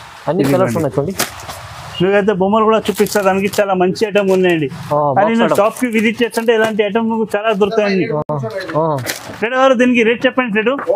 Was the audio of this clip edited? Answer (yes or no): no